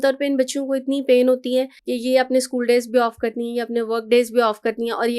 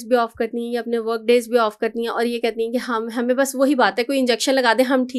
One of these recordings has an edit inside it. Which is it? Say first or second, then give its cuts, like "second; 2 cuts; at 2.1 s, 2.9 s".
first; 1 cut; at 1.8 s